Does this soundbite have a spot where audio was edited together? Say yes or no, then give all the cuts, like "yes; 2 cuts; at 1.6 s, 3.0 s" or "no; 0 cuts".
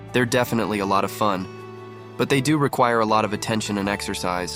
no; 0 cuts